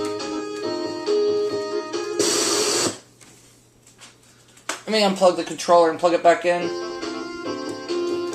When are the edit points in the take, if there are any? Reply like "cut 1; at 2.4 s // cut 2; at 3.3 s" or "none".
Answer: cut 1; at 1.0 s